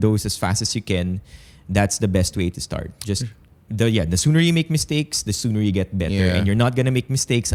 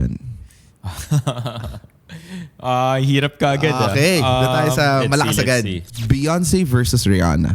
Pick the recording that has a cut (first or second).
second